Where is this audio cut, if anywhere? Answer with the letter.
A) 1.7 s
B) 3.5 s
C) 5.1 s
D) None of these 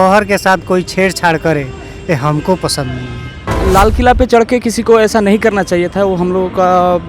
B